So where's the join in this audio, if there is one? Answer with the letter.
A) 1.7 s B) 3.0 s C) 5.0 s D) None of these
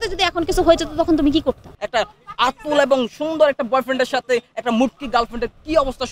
A